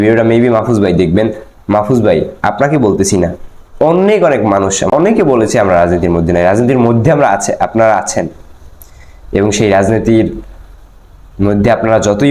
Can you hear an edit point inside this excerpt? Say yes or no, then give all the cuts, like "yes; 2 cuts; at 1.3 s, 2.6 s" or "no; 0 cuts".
yes; 1 cut; at 4.9 s